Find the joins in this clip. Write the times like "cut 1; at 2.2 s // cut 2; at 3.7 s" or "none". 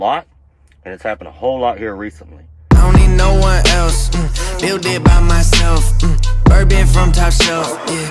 cut 1; at 2.5 s